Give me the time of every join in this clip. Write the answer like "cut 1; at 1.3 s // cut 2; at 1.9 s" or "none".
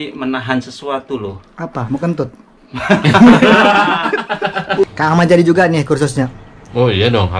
cut 1; at 4.6 s